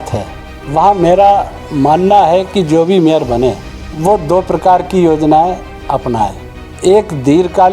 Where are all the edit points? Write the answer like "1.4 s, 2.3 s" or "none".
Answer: none

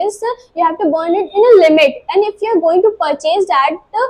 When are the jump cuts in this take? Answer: none

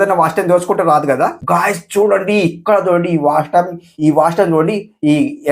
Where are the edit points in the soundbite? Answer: 1.4 s

